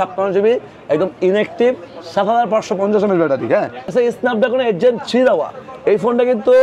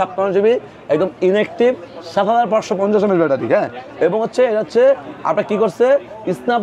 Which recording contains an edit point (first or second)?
first